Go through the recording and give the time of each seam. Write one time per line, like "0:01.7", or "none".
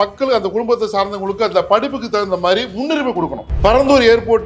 0:03.4